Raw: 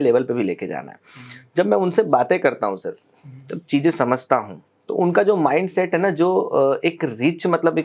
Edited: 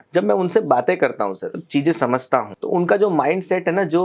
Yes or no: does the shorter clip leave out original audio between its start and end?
yes